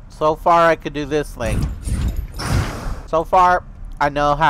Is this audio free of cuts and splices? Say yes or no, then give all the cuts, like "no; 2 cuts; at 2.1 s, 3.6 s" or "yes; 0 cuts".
no; 1 cut; at 3.0 s